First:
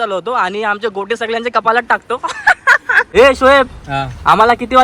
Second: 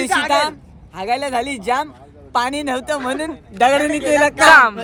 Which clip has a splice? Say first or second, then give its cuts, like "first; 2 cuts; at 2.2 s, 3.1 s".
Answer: first; 1 cut; at 3.0 s